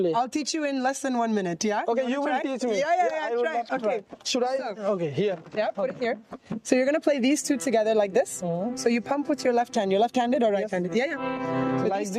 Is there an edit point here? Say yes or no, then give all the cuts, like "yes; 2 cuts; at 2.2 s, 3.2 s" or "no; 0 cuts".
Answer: no; 0 cuts